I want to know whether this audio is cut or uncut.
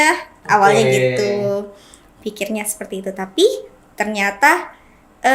uncut